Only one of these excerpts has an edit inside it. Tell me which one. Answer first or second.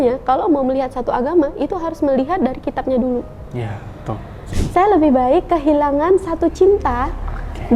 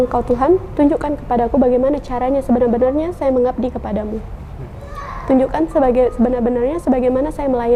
first